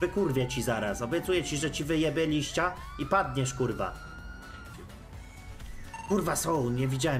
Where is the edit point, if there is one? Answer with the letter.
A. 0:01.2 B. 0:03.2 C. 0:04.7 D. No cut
C